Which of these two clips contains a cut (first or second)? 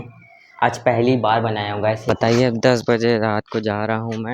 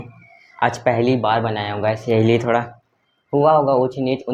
first